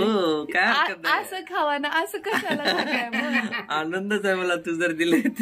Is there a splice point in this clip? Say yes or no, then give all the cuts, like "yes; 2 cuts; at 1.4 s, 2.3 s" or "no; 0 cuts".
no; 0 cuts